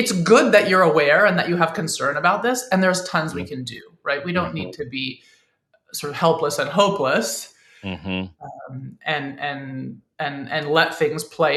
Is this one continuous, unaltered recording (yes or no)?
yes